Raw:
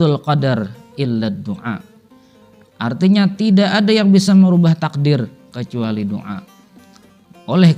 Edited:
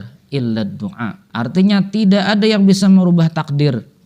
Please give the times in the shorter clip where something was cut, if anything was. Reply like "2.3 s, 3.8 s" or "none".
1.2 s

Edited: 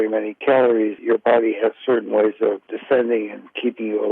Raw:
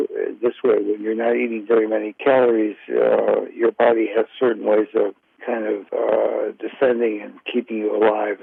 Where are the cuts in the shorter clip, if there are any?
1.0 s, 2.7 s

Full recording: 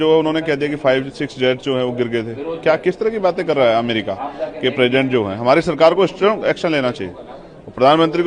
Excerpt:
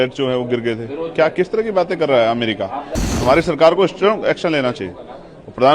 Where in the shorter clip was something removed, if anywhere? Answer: 3.1 s

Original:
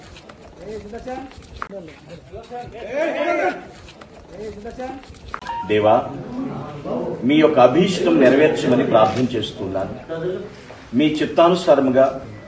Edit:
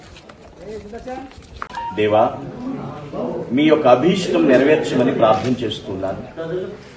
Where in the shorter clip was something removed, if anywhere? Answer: 1.5 s

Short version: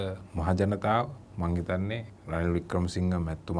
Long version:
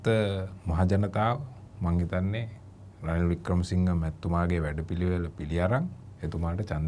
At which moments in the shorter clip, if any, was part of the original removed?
1.2 s, 2.1 s

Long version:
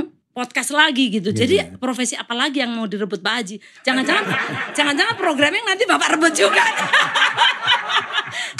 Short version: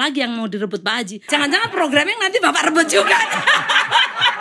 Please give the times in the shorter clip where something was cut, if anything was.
1.2 s

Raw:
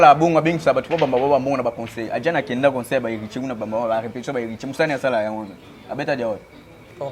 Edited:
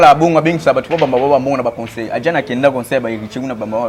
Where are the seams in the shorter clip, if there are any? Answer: none

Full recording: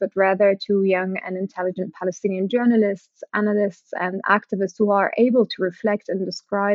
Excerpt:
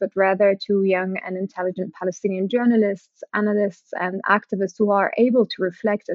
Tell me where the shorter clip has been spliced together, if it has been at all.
none

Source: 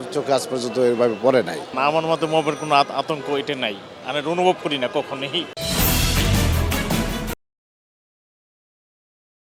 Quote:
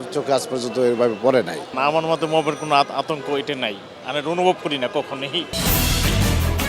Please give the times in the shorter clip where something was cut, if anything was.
5.5 s

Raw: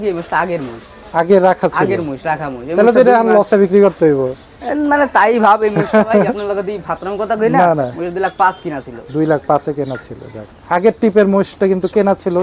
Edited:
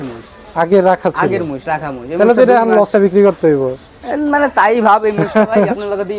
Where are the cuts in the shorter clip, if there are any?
none

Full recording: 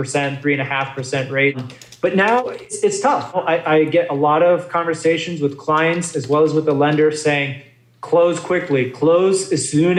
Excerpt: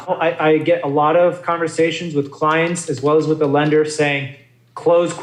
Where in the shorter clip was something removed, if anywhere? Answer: none

